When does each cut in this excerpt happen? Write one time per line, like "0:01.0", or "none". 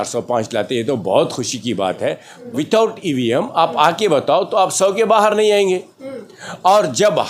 0:02.3